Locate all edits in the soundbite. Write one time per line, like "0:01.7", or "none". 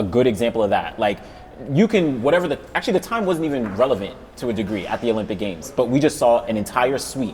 none